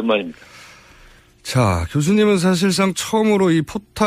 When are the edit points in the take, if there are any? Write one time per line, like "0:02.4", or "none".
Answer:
0:02.1